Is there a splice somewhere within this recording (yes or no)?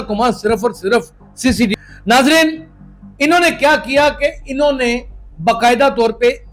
yes